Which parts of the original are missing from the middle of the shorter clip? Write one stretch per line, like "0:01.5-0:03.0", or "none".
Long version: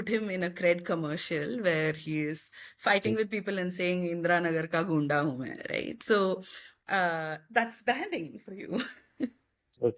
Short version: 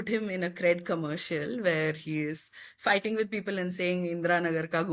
none